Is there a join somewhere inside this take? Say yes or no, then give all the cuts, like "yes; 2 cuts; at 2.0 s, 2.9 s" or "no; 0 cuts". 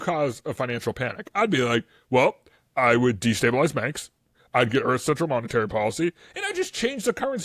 no; 0 cuts